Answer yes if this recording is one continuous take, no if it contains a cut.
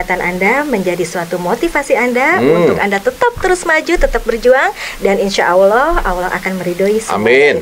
yes